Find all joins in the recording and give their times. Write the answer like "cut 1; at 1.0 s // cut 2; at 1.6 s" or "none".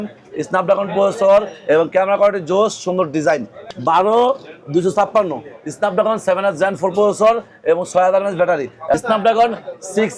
cut 1; at 3.6 s // cut 2; at 8.9 s